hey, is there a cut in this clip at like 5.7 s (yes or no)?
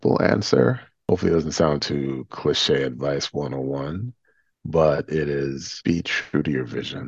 yes